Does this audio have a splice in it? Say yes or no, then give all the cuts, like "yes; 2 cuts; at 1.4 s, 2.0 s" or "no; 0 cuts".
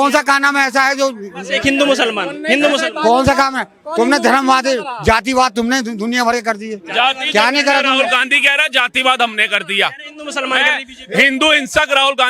no; 0 cuts